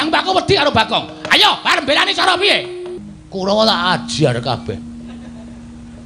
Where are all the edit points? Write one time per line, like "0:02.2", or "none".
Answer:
0:03.0

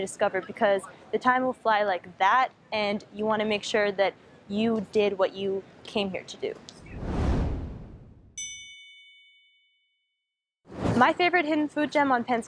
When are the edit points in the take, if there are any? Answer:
none

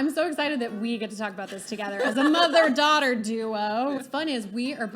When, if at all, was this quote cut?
0:04.0

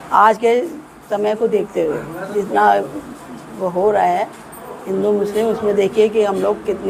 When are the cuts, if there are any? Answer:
none

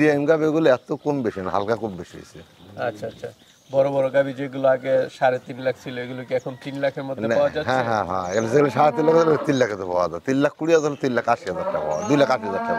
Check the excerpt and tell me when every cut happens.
none

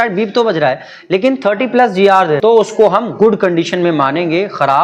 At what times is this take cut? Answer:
0:02.4

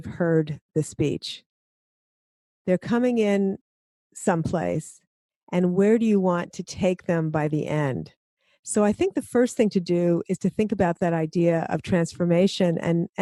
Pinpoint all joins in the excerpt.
none

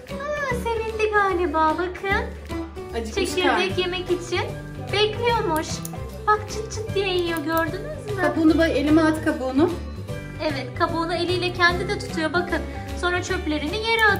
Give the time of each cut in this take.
none

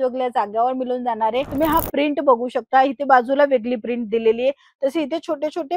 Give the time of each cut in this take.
0:01.5

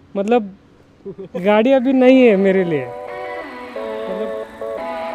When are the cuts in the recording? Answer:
0:02.9

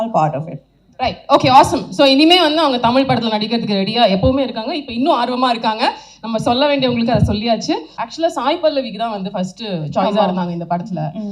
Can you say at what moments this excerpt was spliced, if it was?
0:08.0

